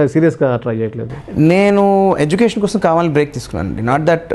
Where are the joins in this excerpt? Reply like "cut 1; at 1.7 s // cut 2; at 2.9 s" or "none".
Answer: none